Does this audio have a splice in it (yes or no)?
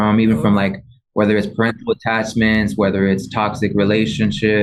no